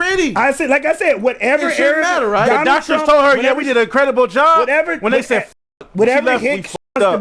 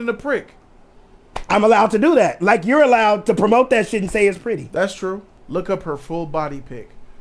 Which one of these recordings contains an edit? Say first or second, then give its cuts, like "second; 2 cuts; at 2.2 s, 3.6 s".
second; 1 cut; at 5.3 s